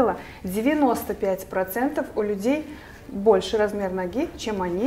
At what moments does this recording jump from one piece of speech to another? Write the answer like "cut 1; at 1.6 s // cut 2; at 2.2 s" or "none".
none